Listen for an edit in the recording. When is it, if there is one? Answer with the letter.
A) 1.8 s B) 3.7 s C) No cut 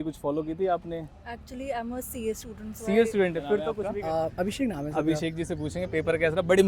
B